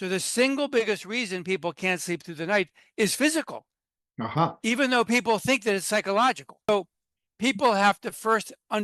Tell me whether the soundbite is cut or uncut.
cut